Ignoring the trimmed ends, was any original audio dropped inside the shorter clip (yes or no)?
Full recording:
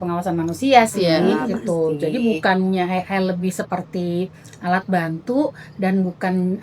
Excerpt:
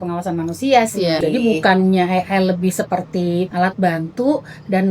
yes